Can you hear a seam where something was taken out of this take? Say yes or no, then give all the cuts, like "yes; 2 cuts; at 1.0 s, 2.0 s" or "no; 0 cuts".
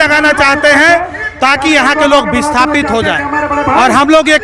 no; 0 cuts